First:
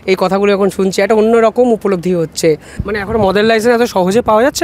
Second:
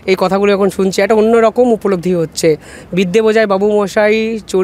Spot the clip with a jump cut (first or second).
first